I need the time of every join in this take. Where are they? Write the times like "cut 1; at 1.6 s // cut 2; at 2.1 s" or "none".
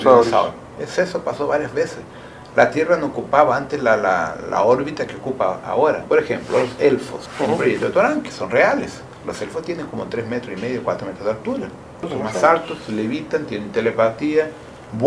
cut 1; at 6.0 s // cut 2; at 7.2 s // cut 3; at 9.1 s // cut 4; at 12.1 s

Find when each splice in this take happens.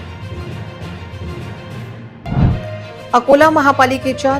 cut 1; at 1.6 s

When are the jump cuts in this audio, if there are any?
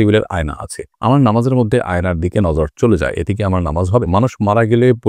cut 1; at 4.1 s

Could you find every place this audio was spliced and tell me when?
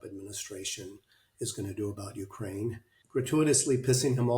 cut 1; at 2.9 s

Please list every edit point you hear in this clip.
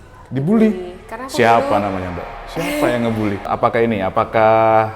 cut 1; at 3.5 s

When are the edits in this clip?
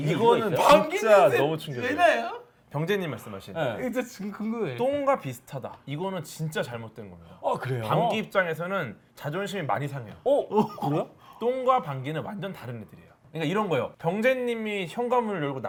none

